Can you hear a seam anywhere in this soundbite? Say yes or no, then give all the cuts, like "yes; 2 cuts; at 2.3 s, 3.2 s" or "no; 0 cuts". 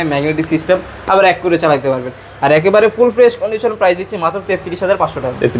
no; 0 cuts